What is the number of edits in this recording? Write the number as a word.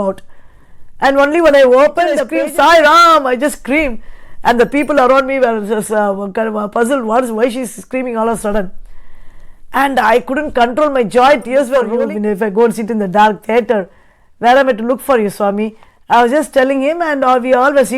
two